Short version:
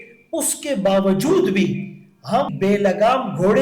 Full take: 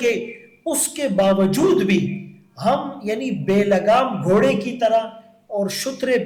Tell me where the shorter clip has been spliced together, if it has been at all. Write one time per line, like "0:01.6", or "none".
0:02.5